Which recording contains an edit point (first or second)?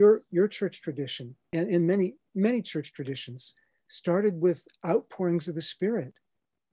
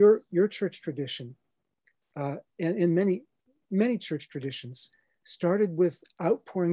first